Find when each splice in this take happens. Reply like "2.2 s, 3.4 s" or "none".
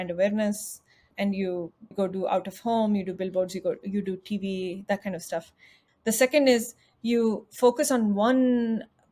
5.8 s